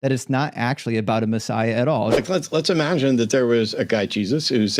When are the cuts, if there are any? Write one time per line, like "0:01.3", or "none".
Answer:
0:02.2

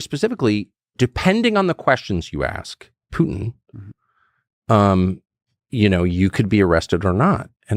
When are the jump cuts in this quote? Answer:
0:00.9

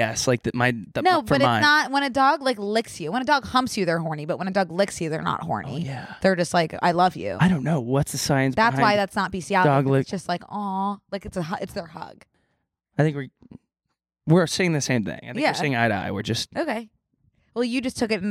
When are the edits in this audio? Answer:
0:12.3

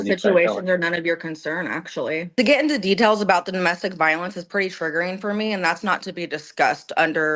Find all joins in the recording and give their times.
0:02.3

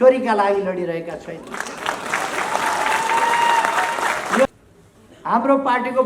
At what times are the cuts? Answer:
0:04.5

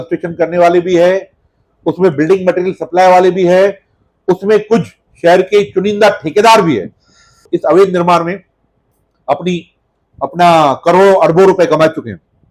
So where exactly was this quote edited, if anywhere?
0:07.4

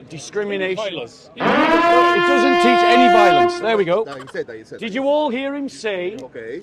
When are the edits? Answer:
none

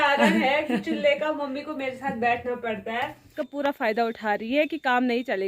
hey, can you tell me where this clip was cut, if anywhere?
0:03.3

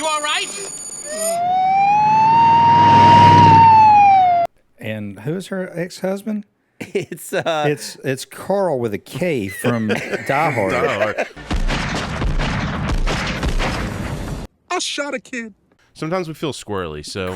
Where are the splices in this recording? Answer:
0:04.5
0:14.4
0:15.7

